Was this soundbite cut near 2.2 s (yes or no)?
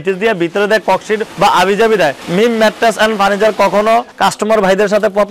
yes